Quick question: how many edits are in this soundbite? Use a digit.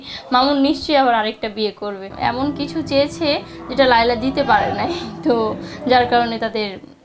1